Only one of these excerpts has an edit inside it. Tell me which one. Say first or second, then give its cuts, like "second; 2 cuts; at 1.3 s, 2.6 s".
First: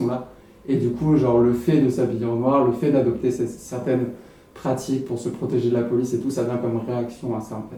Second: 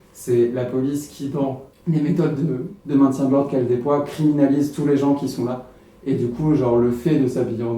second; 2 cuts; at 1.7 s, 2.7 s